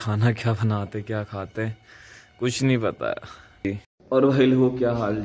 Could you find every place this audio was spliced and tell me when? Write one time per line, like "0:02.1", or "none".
0:03.9